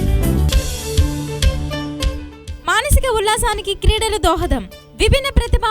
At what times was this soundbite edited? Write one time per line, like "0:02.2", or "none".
0:01.9